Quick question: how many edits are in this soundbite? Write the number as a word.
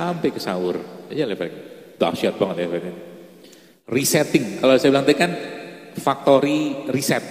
zero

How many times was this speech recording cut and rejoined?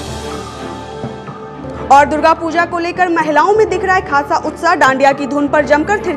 one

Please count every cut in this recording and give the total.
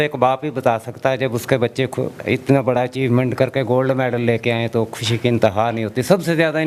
zero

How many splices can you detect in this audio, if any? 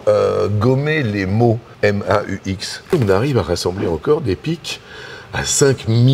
two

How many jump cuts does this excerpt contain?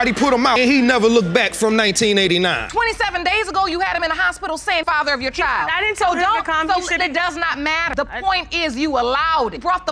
one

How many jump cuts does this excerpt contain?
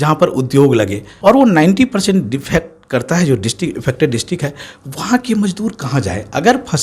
one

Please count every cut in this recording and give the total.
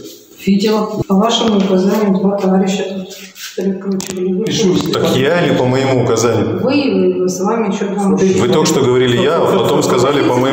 one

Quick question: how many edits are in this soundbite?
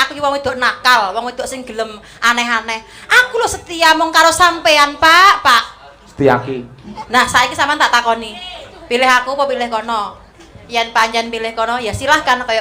one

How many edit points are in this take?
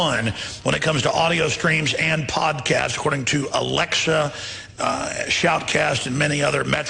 one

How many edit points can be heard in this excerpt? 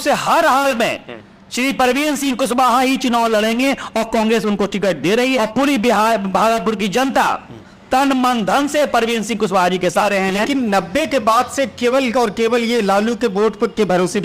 two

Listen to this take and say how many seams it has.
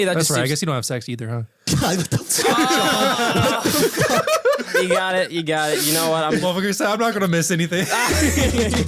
two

